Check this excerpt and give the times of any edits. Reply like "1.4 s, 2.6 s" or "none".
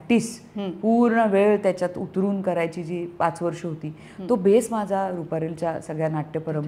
none